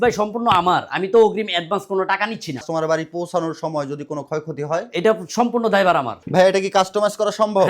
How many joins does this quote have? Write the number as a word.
two